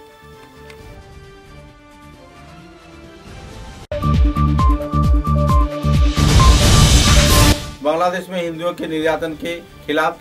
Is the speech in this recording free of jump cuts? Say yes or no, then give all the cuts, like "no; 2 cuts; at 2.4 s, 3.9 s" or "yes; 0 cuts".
yes; 0 cuts